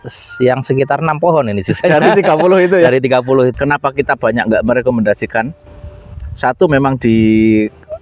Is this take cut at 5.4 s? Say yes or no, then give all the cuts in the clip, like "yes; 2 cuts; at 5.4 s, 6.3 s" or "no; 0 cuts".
no; 1 cut; at 3.5 s